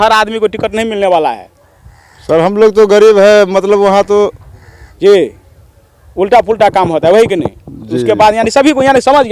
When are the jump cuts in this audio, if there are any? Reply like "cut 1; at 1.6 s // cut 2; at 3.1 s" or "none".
none